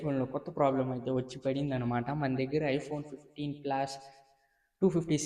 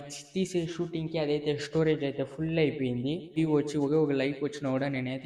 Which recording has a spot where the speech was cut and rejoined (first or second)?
second